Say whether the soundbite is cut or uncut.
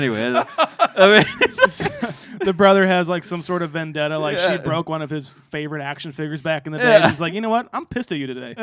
uncut